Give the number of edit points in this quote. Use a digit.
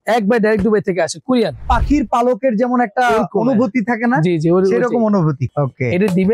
2